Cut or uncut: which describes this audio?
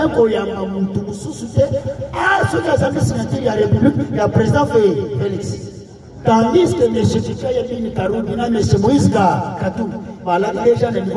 uncut